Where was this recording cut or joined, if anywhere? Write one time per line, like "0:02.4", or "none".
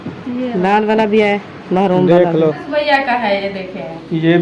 0:02.7